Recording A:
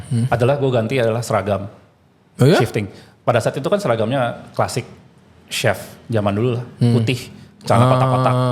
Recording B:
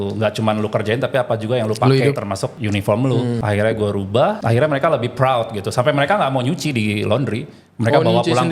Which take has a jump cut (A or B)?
B